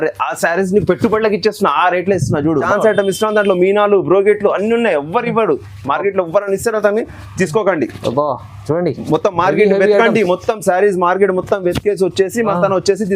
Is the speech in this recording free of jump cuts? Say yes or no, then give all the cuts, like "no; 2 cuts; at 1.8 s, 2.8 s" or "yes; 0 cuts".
no; 1 cut; at 2.7 s